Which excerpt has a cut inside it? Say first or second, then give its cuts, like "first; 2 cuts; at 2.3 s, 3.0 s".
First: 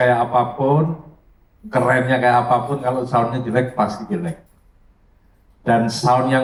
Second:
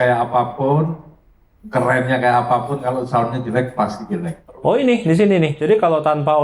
second; 1 cut; at 4.4 s